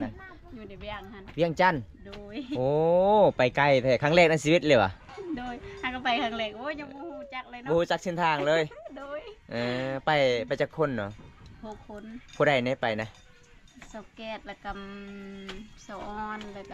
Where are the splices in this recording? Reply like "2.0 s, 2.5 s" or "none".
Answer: none